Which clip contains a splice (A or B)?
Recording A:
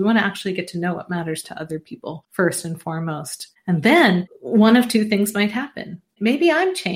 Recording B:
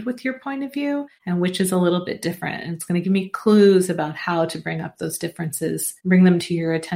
B